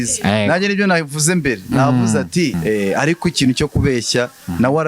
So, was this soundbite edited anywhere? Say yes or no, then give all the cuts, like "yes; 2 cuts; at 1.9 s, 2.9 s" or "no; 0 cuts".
yes; 1 cut; at 2.6 s